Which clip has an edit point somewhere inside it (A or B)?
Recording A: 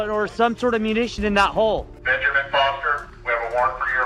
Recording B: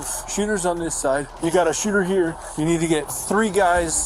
A